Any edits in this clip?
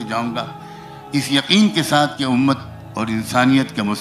no; 0 cuts

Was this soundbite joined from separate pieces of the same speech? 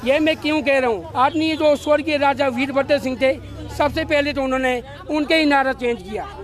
yes; 1 cut; at 1.1 s

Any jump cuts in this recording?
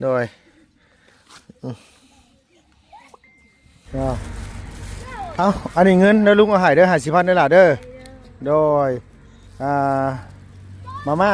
yes; 1 cut; at 3.8 s

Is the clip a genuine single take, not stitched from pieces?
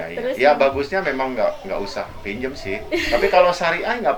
yes; 0 cuts

